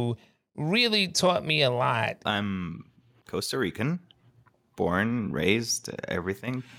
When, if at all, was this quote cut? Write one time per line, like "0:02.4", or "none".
0:02.2